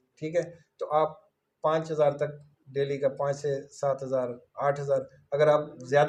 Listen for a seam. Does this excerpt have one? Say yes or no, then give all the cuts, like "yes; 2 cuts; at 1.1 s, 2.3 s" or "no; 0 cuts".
no; 0 cuts